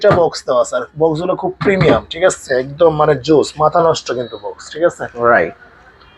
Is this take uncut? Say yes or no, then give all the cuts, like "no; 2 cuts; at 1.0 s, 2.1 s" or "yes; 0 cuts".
yes; 0 cuts